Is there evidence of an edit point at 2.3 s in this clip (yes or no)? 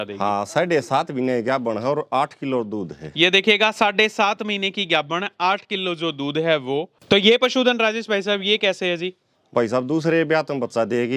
no